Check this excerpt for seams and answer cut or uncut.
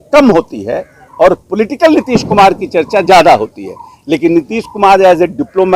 uncut